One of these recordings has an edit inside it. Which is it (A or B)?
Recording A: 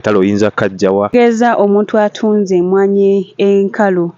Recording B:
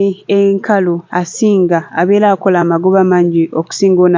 A